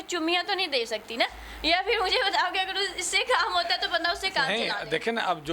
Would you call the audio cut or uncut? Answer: uncut